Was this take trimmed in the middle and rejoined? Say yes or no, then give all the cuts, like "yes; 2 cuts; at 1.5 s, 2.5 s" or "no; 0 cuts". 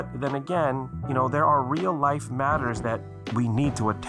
yes; 1 cut; at 0.9 s